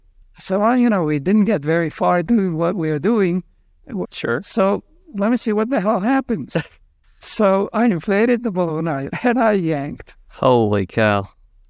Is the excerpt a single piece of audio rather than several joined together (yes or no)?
no